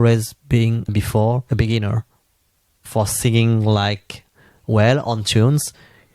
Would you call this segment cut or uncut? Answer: uncut